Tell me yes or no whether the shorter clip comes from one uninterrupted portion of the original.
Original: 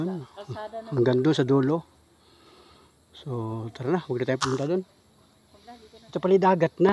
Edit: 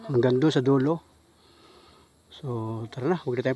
yes